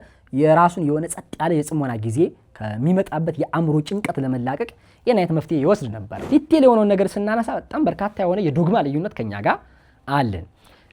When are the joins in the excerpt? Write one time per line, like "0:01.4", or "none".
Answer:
0:06.1